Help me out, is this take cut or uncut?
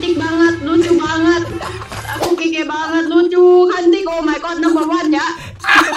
uncut